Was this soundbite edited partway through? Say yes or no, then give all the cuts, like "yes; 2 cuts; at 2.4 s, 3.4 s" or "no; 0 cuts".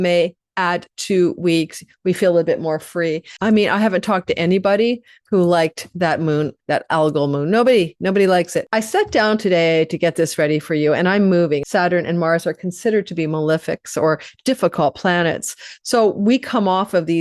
yes; 3 cuts; at 3.3 s, 8.6 s, 11.6 s